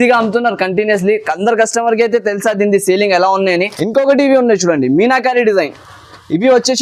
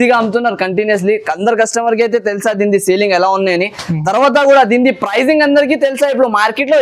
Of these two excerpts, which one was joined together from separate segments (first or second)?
first